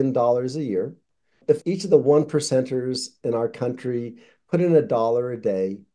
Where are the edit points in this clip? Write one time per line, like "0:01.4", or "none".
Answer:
0:01.5

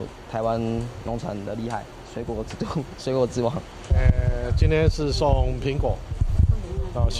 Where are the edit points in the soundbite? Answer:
0:03.8

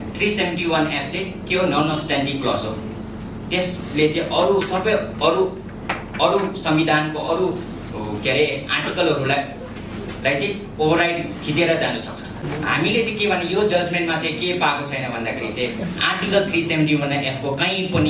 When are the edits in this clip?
0:12.4

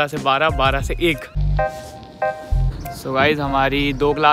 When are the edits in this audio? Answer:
0:01.3

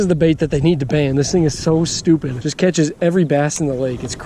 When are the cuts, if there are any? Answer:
0:02.4

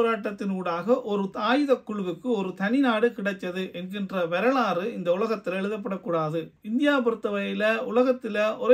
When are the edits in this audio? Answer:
0:06.5

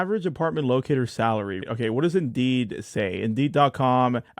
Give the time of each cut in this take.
0:01.6

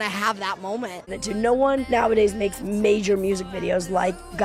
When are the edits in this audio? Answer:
0:01.1

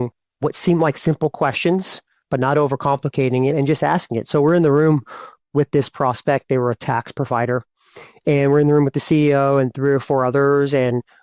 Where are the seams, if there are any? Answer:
none

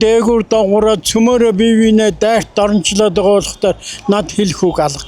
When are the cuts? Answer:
none

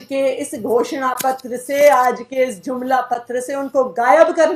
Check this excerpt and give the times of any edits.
none

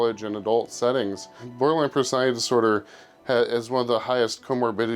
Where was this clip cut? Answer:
0:01.4

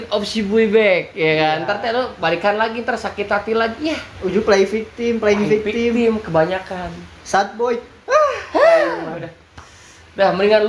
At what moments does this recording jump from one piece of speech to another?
none

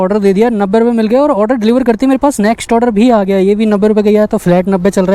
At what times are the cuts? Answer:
none

